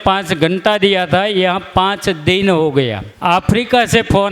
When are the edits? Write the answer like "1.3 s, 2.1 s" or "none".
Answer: 3.1 s